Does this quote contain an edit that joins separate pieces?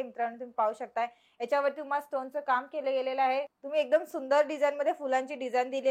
yes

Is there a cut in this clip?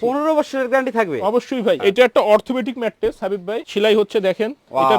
yes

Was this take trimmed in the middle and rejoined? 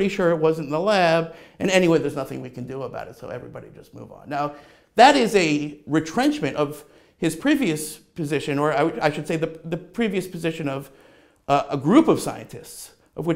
no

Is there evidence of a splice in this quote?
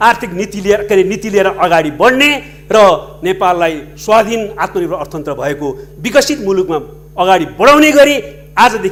no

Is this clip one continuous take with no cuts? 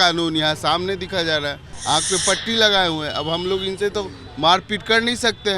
no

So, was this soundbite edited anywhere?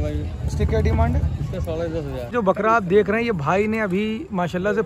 yes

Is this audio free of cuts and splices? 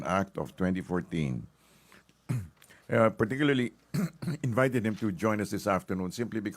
no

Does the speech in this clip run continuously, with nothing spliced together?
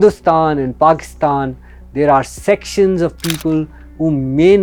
yes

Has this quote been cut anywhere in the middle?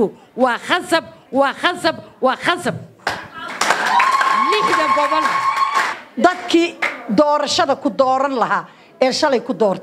yes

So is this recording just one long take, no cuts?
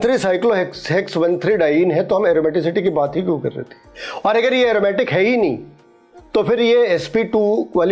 yes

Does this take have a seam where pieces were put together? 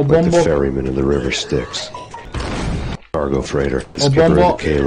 yes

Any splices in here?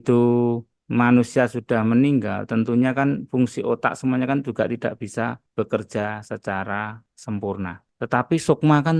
no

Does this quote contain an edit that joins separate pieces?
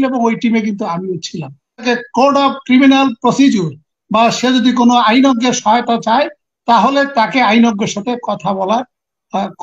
yes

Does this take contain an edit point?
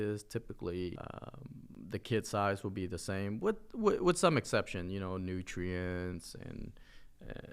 no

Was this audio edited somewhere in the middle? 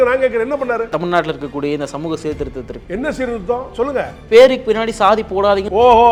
no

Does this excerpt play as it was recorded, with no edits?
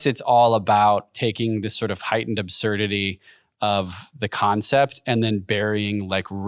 no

